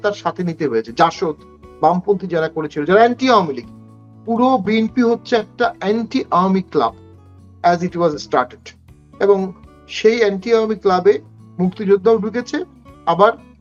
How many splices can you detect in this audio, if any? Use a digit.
0